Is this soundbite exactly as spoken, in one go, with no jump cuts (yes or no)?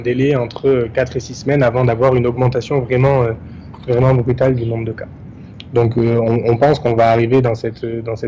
yes